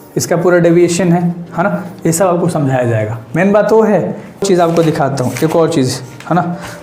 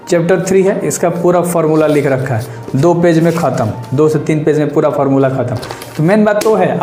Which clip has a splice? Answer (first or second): first